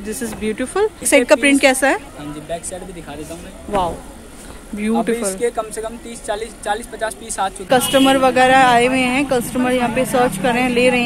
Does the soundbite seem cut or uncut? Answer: cut